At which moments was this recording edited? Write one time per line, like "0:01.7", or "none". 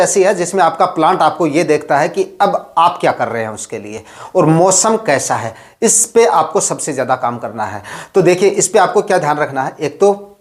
none